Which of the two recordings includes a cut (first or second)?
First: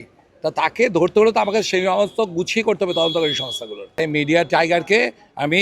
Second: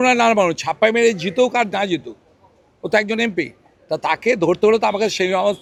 first